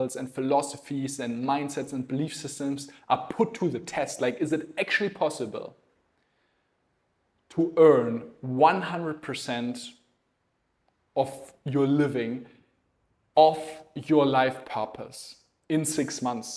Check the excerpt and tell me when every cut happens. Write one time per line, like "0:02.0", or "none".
none

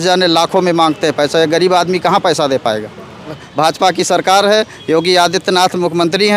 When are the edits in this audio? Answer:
0:03.4

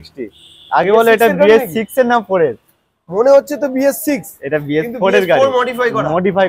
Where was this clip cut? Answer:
none

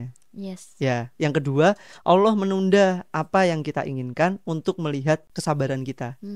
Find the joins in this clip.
0:05.3

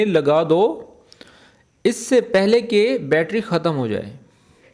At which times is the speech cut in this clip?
none

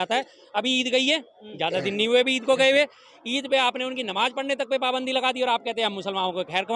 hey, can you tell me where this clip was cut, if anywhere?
none

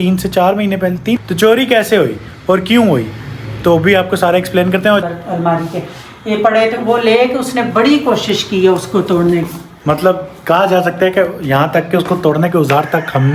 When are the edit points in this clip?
0:01.2
0:05.0

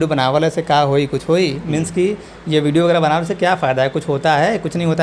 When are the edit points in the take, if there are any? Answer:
none

